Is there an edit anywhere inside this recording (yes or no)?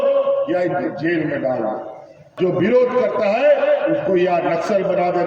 yes